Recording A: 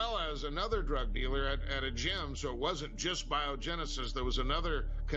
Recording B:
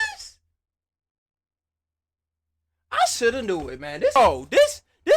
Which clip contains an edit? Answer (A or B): B